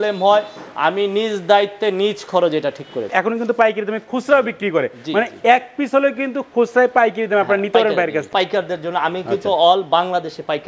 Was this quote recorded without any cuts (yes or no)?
no